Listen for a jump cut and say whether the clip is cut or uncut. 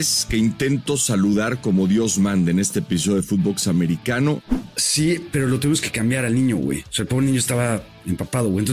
cut